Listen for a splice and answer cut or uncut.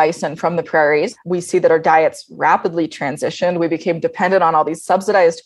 cut